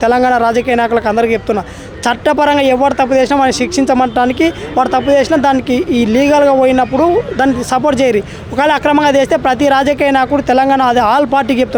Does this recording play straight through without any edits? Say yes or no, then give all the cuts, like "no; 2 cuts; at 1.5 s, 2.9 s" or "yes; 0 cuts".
yes; 0 cuts